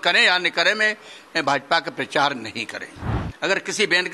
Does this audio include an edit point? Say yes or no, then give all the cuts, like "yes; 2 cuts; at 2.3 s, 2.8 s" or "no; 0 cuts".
yes; 1 cut; at 3.2 s